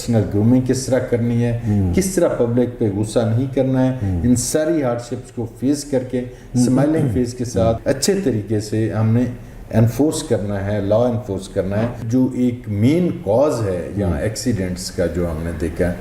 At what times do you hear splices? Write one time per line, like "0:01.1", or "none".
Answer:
0:07.8
0:12.0